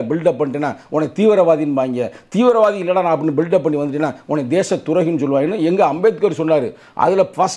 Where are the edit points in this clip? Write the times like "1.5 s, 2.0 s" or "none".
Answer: none